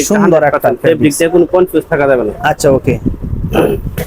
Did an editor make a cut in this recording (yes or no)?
no